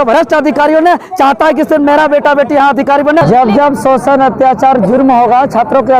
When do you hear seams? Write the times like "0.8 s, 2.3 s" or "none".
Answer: 3.2 s